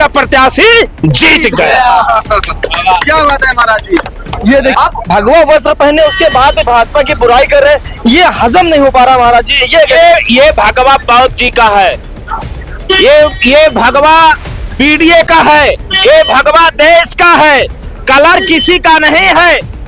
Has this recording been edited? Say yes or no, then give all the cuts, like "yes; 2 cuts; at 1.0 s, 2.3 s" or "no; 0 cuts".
yes; 1 cut; at 4.7 s